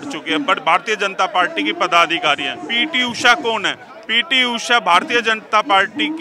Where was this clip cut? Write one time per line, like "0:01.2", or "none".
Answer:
0:02.6